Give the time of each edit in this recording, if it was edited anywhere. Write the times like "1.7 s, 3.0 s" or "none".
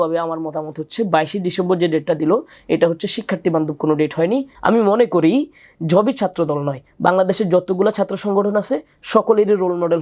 4.5 s